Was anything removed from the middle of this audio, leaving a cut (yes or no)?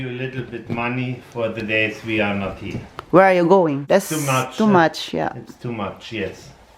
yes